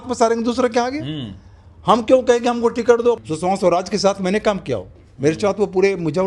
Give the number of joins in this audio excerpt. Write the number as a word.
one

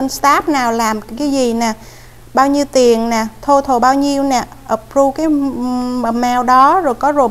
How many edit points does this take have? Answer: zero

